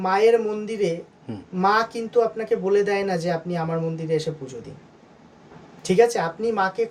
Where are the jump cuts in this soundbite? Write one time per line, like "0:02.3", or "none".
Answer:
none